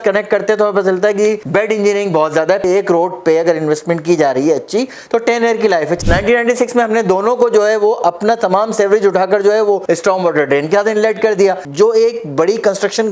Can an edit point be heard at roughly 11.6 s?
yes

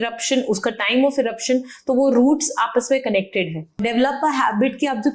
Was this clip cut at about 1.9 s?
no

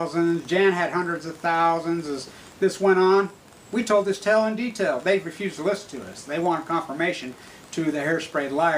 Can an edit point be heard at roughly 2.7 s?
yes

